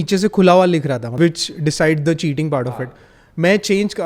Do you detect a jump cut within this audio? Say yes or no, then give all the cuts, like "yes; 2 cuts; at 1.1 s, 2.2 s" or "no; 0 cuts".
yes; 1 cut; at 1.1 s